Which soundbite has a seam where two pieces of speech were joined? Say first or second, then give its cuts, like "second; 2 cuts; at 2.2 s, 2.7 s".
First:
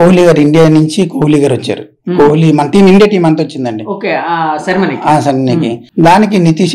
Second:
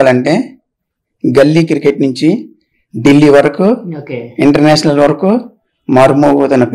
first; 1 cut; at 5.8 s